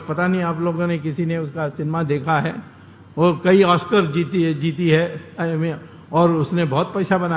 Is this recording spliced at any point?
no; 0 cuts

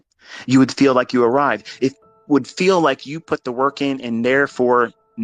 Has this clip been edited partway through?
no; 0 cuts

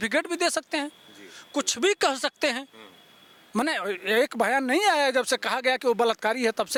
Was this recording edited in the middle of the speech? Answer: no; 0 cuts

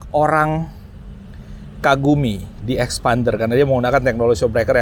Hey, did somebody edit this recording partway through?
no; 0 cuts

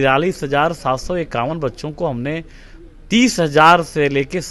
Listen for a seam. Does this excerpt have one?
no; 0 cuts

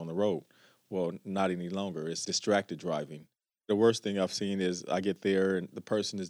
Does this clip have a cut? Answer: yes; 2 cuts; at 2.2 s, 3.7 s

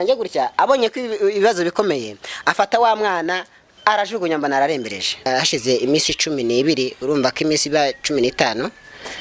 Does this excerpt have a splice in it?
yes; 1 cut; at 5.3 s

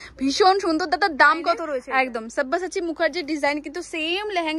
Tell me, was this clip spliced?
yes; 1 cut; at 1.8 s

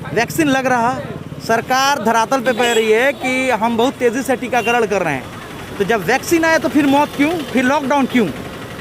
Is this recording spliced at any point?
no; 0 cuts

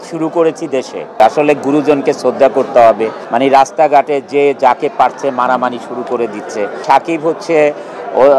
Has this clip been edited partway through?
yes; 3 cuts; at 1.2 s, 3.2 s, 6.8 s

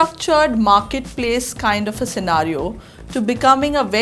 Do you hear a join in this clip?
no; 0 cuts

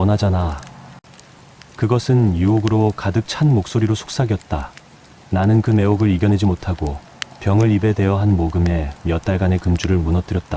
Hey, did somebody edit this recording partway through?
no; 0 cuts

